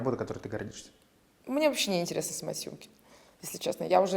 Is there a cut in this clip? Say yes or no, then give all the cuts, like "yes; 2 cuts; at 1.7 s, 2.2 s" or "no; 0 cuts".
no; 0 cuts